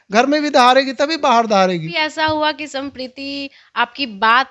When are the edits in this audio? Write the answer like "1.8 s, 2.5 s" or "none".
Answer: 1.9 s